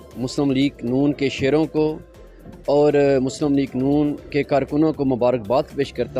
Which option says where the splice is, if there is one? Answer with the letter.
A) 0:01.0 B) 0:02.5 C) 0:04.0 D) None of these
D